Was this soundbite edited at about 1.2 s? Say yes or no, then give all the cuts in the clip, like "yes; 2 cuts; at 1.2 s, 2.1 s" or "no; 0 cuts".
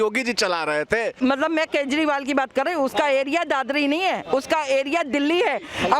yes; 1 cut; at 1.2 s